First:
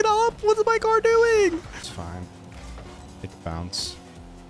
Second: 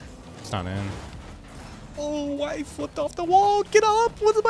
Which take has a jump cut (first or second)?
first